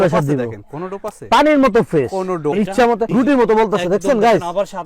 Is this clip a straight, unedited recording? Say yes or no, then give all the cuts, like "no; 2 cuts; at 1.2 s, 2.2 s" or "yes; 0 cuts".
no; 1 cut; at 2.5 s